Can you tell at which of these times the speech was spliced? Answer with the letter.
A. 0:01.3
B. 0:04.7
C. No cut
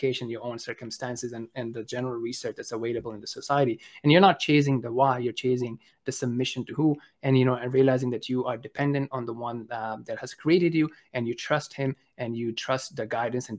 C